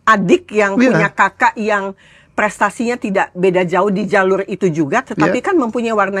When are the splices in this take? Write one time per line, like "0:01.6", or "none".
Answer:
none